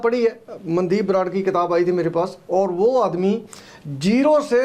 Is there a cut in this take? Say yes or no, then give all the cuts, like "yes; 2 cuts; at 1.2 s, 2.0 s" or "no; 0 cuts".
no; 0 cuts